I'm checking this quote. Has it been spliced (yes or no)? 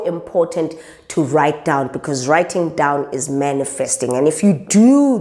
no